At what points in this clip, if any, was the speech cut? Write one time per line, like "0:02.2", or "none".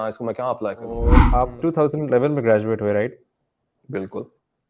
0:01.2